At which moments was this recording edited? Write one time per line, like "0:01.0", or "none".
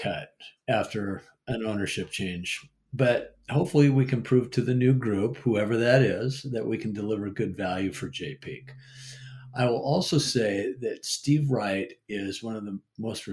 none